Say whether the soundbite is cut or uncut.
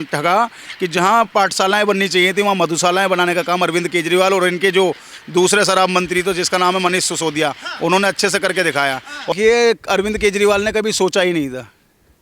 cut